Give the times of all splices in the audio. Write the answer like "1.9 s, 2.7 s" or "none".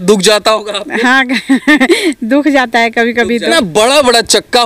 3.5 s